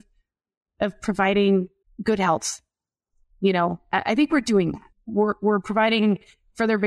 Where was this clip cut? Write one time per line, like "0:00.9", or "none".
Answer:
0:01.8
0:04.8